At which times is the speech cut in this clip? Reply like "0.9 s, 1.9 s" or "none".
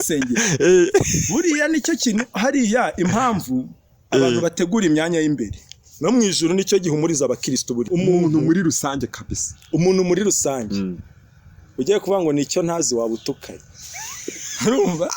7.9 s

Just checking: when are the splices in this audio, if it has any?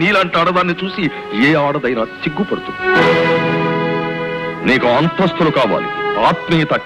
none

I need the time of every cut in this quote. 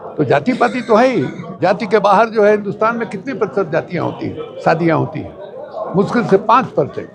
1.4 s

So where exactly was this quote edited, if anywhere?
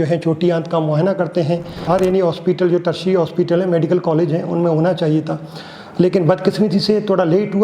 1.8 s

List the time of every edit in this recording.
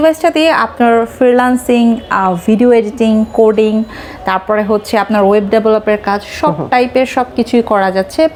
none

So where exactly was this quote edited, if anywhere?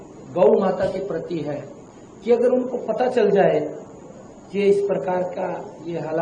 none

